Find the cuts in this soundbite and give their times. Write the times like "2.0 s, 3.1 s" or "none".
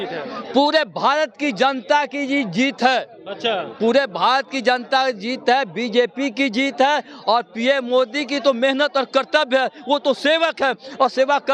none